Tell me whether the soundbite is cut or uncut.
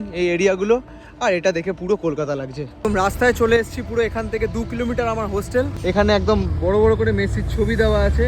cut